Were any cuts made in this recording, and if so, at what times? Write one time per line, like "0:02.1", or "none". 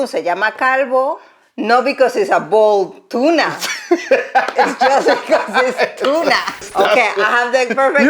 0:06.6